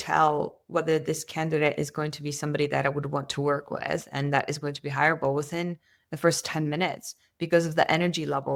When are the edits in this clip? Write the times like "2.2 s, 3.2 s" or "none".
none